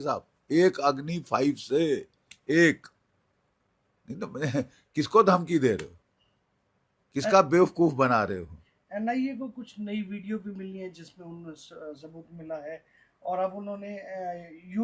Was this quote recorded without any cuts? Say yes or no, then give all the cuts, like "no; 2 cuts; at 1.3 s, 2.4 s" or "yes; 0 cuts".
yes; 0 cuts